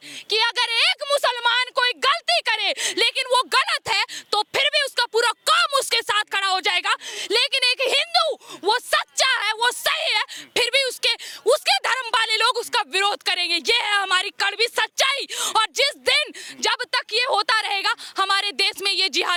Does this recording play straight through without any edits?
yes; 0 cuts

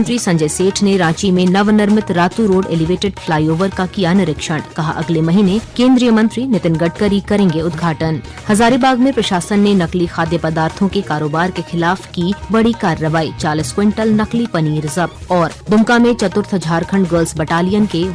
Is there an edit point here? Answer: yes; 4 cuts; at 5.7 s, 8.3 s, 12.4 s, 15.5 s

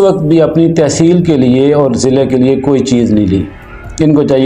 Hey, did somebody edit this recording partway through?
no; 0 cuts

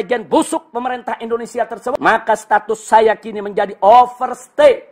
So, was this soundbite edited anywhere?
yes; 1 cut; at 1.8 s

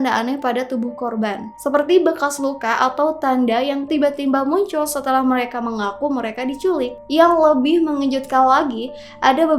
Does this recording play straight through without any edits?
no; 1 cut; at 7.0 s

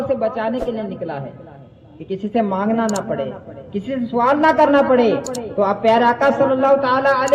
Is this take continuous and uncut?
yes; 0 cuts

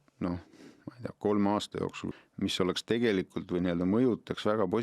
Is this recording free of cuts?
no; 1 cut; at 2.0 s

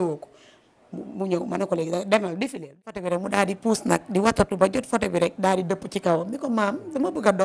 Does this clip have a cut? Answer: yes; 1 cut; at 3.2 s

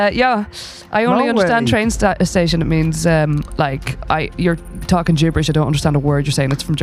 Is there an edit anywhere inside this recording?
no; 0 cuts

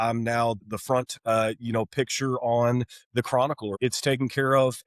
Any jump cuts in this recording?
yes; 1 cut; at 3.8 s

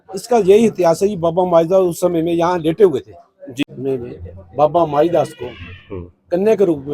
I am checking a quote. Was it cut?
yes; 1 cut; at 3.6 s

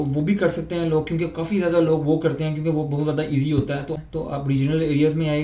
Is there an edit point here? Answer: yes; 1 cut; at 4.0 s

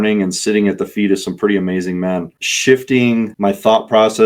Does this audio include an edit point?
yes; 2 cuts; at 2.3 s, 3.3 s

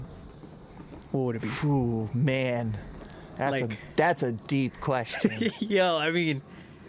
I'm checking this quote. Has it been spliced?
no; 0 cuts

